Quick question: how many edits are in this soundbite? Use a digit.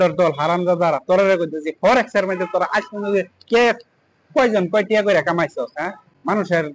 0